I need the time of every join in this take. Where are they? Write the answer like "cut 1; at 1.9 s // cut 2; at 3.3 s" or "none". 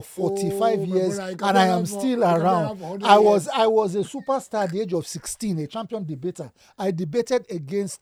none